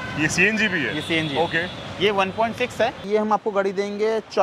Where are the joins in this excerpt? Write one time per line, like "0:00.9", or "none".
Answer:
0:03.0